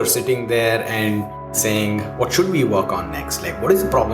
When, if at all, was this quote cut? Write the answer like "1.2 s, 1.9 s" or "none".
1.6 s